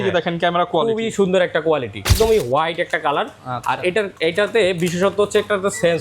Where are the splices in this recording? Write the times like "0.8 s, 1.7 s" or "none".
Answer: 2.1 s